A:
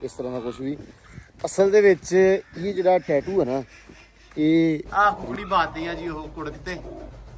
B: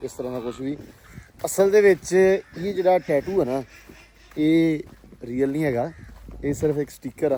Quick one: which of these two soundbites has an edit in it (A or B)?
A